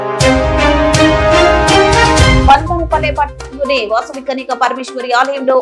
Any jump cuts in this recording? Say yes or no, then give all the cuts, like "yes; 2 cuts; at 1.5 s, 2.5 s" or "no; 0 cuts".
no; 0 cuts